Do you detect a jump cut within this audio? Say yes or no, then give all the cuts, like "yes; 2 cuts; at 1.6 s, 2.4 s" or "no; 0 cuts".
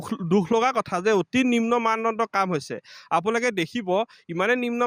no; 0 cuts